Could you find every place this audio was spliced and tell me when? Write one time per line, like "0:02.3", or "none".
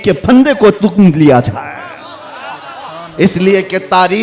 none